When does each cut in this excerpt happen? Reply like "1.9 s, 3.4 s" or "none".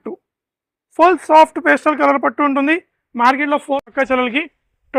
3.9 s